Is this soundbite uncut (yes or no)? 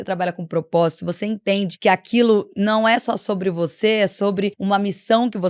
no